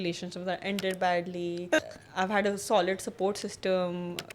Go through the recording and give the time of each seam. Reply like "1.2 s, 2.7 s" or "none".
1.8 s